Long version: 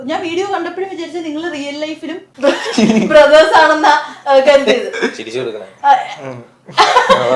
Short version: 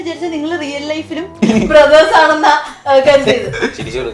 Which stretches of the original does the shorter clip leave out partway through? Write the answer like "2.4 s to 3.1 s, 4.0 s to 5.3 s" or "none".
2.3 s to 2.8 s